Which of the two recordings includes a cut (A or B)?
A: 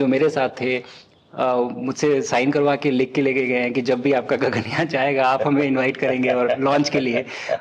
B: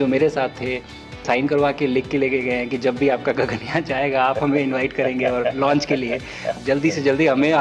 B